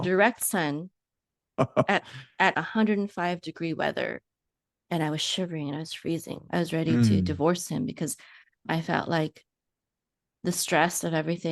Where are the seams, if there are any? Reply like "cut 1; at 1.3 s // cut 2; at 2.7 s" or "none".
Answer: cut 1; at 6.4 s